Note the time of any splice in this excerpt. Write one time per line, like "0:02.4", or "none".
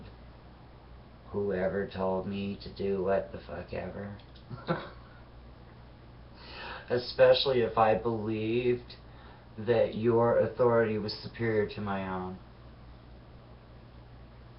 0:08.0